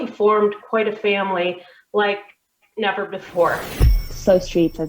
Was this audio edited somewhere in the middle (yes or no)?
yes